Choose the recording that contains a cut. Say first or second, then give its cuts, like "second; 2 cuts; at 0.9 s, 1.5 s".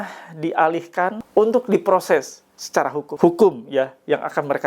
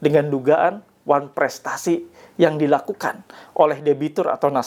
first; 2 cuts; at 1.2 s, 3.1 s